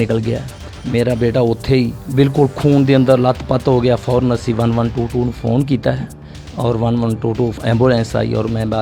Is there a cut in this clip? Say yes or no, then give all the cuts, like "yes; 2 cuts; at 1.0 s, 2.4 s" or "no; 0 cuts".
no; 0 cuts